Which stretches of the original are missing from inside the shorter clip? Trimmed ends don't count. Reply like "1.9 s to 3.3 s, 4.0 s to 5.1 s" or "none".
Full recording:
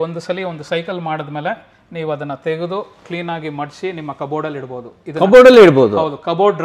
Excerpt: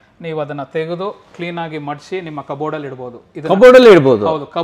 none